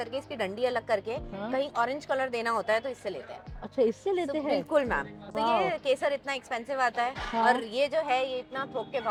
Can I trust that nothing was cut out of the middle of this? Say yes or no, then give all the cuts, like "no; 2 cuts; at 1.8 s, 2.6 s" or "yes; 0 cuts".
yes; 0 cuts